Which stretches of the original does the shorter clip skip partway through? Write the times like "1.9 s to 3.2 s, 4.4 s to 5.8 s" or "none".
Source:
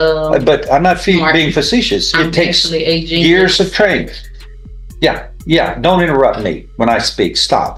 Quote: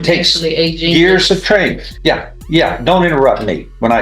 4.2 s to 4.8 s